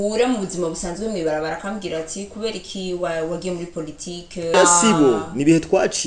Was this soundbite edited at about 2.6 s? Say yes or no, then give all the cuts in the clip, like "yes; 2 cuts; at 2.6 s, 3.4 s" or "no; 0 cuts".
no; 1 cut; at 4.5 s